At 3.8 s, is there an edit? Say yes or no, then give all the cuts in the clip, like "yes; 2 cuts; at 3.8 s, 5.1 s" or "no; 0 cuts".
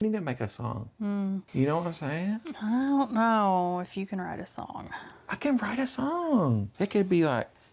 no; 2 cuts; at 1.5 s, 6.7 s